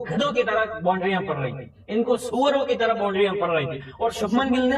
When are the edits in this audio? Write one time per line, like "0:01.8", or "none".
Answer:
none